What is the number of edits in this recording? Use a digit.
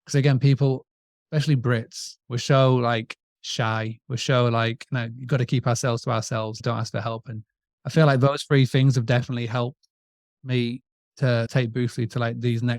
0